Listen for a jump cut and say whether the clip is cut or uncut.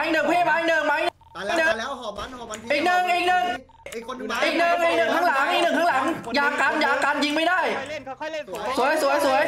uncut